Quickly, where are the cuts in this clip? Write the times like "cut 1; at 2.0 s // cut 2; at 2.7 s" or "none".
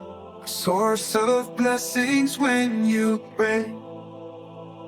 cut 1; at 3.8 s